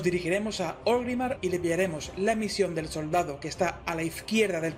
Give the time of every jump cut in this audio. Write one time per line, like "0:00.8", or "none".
0:00.9